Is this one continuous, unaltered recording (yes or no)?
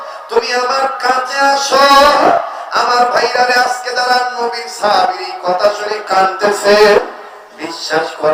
yes